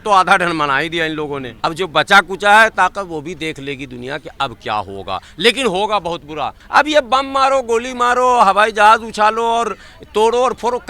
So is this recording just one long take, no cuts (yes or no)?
no